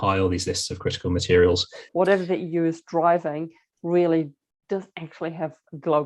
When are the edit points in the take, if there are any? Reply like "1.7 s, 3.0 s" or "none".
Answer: 1.8 s